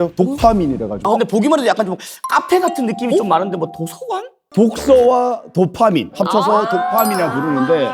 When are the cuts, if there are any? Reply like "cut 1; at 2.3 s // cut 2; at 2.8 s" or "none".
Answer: cut 1; at 1.0 s // cut 2; at 4.4 s